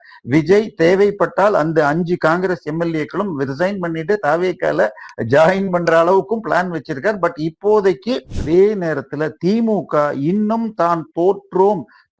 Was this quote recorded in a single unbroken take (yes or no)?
no